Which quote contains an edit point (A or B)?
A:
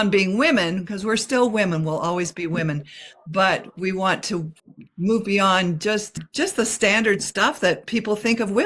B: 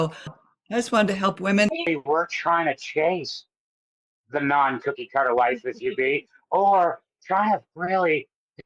B